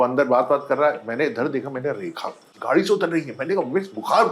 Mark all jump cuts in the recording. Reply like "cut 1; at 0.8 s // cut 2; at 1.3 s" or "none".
none